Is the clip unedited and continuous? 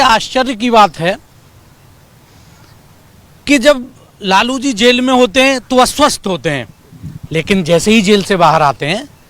yes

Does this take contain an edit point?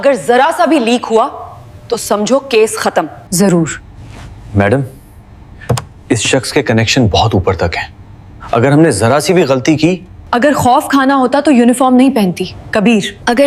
no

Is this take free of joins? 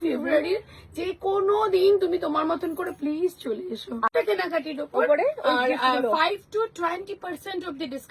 no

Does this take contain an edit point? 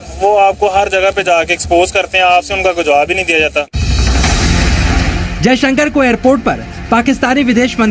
no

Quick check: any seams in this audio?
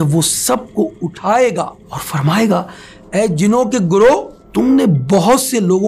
yes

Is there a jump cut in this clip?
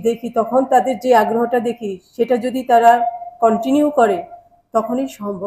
no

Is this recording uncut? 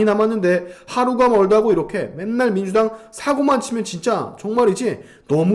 yes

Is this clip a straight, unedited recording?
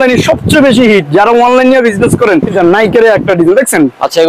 no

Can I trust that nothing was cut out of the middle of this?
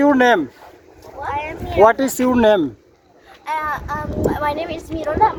yes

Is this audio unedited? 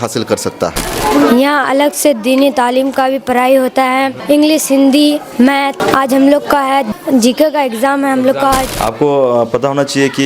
no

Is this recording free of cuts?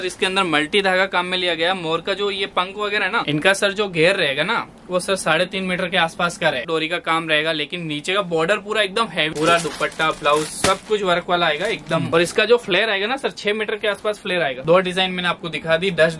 no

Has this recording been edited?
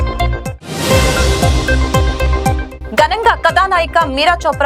yes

